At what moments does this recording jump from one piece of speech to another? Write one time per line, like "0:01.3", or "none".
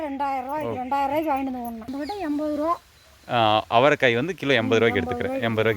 0:01.9